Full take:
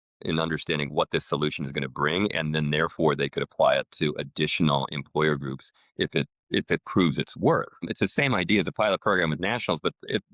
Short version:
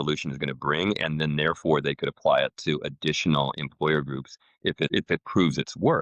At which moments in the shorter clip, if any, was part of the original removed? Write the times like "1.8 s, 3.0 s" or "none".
4.9 s